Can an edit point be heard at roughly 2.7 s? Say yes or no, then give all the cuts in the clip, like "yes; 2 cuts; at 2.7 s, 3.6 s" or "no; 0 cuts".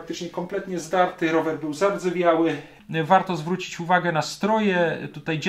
yes; 1 cut; at 2.7 s